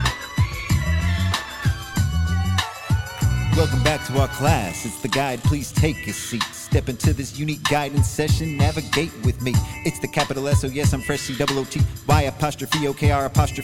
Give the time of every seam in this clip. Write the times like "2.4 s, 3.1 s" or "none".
none

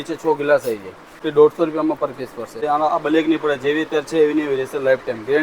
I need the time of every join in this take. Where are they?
1.2 s, 2.6 s

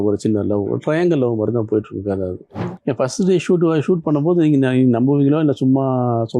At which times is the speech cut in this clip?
2.7 s

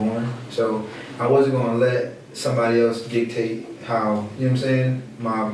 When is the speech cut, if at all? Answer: none

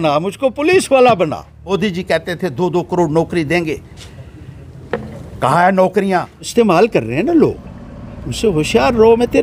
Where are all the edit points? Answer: 1.7 s, 6.4 s

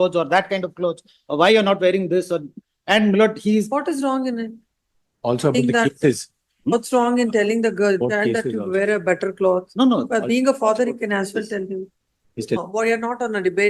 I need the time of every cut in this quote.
12.6 s

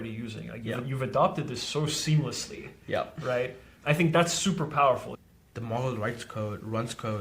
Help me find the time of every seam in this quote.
5.1 s

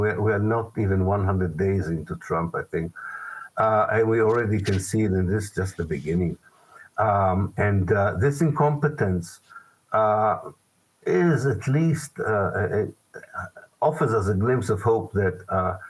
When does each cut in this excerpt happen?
none

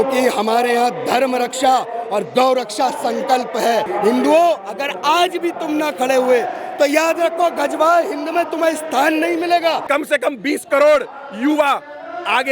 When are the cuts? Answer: 3.9 s, 9.9 s

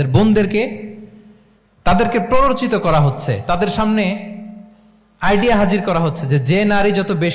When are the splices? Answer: none

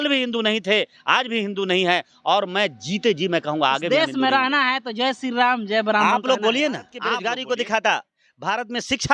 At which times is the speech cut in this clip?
7.0 s

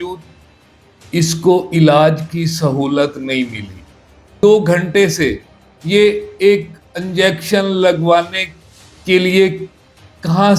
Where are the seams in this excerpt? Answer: 4.4 s

